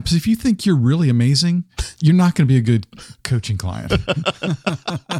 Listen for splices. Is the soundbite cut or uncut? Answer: uncut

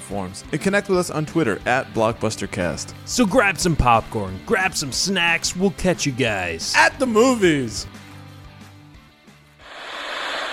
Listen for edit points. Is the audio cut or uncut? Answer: cut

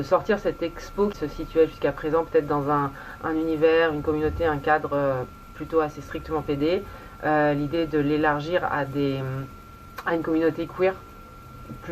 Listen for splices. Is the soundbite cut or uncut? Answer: cut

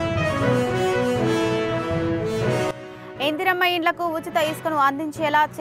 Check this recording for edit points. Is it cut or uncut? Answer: cut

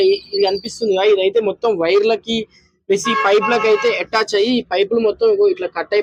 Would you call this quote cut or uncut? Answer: uncut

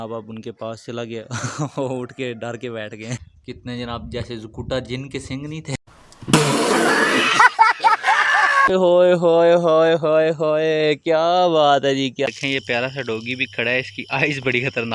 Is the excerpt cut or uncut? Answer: cut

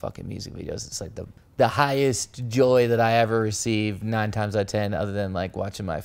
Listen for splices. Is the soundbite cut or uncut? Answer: cut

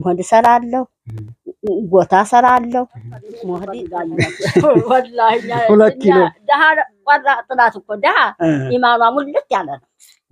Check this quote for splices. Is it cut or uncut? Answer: cut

